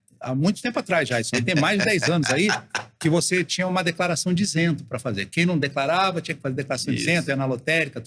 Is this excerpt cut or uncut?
uncut